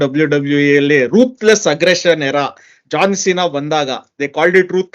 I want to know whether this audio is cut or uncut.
uncut